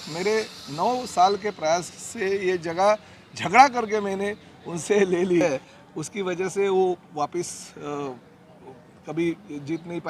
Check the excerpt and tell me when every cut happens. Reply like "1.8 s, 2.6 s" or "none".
5.4 s

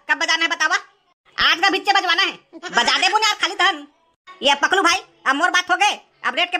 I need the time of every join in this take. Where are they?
none

